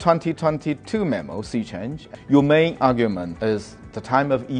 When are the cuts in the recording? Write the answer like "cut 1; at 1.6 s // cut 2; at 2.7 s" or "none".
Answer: cut 1; at 2.0 s // cut 2; at 3.3 s